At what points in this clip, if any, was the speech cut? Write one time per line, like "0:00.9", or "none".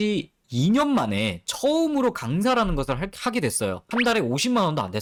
none